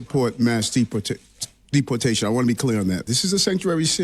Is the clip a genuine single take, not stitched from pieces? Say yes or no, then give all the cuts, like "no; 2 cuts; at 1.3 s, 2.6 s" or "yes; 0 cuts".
no; 1 cut; at 3.1 s